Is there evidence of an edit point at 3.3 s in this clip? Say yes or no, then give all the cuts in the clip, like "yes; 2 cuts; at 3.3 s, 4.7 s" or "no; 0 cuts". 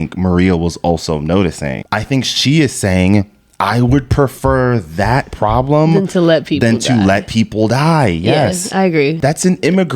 no; 2 cuts; at 1.8 s, 9.2 s